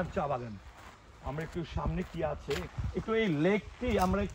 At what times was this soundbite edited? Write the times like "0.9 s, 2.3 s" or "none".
2.7 s